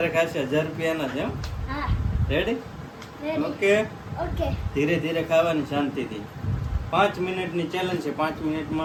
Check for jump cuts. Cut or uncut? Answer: uncut